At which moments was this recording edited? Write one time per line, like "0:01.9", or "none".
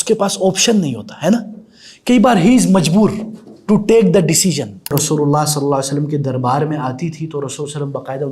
0:04.9